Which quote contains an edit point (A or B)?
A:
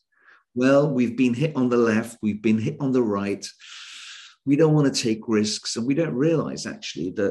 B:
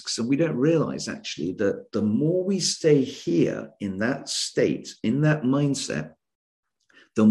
A